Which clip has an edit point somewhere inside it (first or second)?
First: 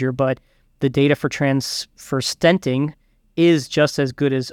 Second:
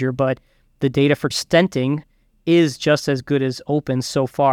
second